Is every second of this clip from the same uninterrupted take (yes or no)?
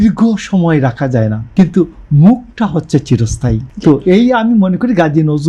no